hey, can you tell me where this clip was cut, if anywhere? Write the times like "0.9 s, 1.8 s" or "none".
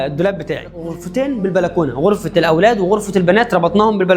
1.0 s

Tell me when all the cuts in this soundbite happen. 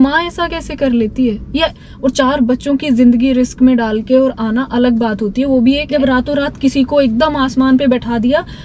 1.8 s, 5.8 s

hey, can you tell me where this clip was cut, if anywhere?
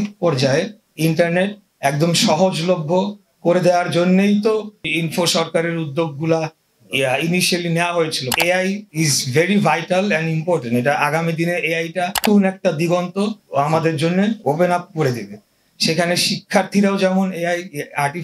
4.9 s, 8.6 s, 12.2 s, 13.4 s

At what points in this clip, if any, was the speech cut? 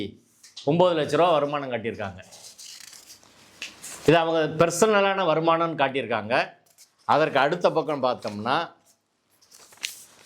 none

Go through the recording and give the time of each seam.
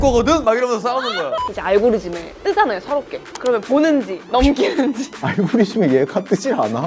1.5 s, 2.2 s, 3.2 s, 4.2 s, 5.1 s

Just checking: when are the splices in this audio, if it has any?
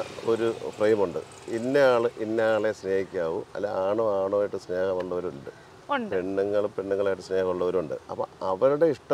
3.6 s, 8.0 s

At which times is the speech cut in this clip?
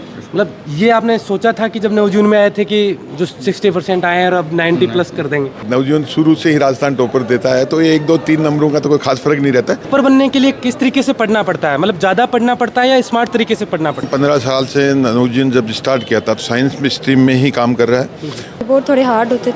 5.6 s, 9.9 s, 14.0 s, 18.6 s

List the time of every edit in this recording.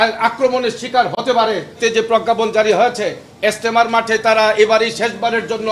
1.8 s

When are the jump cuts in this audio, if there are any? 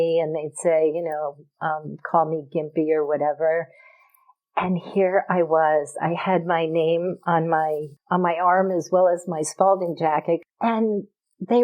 7.9 s, 10.4 s

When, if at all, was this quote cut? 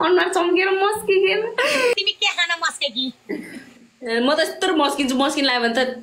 1.9 s

